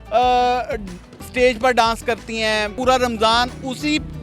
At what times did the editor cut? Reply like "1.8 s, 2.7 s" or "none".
2.7 s